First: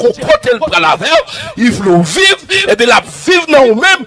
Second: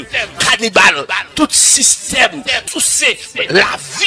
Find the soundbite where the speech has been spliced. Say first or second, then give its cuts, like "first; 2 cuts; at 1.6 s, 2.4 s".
second; 1 cut; at 2.6 s